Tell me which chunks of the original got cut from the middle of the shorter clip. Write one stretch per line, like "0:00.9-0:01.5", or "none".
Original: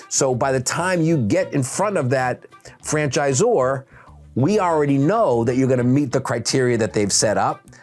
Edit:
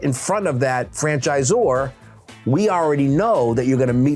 0:02.4-0:02.8